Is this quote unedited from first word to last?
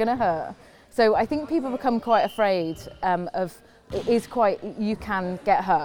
yes; 0 cuts

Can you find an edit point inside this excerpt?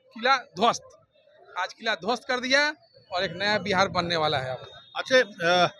no; 0 cuts

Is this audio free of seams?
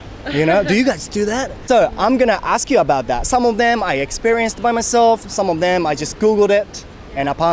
yes; 0 cuts

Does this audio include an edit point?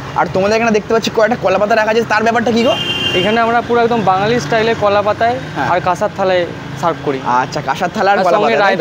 no; 0 cuts

